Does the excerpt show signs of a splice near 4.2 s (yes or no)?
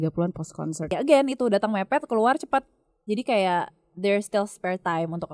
no